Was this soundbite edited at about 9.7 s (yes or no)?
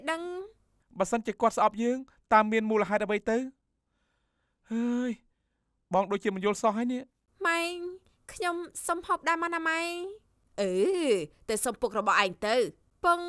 no